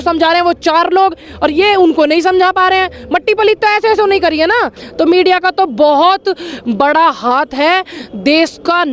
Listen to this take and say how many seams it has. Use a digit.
1